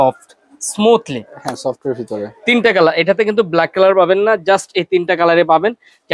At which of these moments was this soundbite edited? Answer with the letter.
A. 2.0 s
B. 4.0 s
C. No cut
C